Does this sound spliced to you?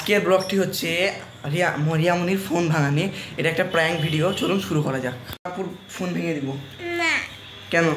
no; 0 cuts

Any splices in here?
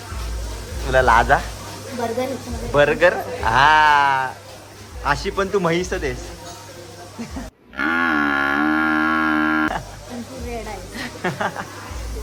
no; 0 cuts

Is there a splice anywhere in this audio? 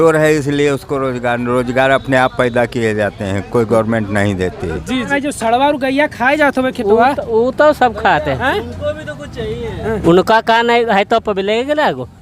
yes; 1 cut; at 5.1 s

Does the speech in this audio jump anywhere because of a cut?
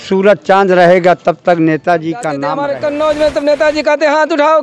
yes; 1 cut; at 2.5 s

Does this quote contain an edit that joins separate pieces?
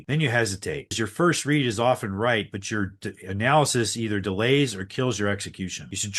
no; 0 cuts

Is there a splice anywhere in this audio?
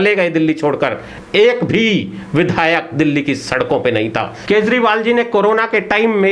yes; 1 cut; at 4.3 s

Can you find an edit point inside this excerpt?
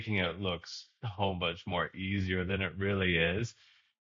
no; 0 cuts

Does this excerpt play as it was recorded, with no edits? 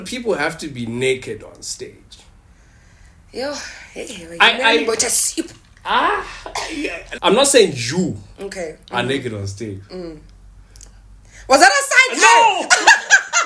no; 1 cut; at 7.1 s

